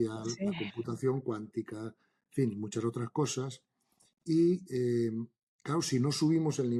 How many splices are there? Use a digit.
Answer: 0